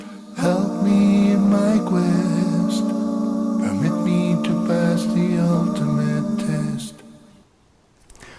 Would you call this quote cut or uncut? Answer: cut